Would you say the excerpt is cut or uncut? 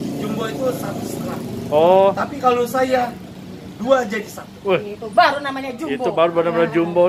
uncut